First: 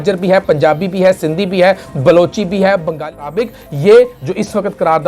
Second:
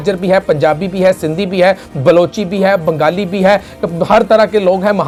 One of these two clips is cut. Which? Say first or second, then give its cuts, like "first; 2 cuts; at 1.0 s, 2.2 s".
first; 1 cut; at 3.3 s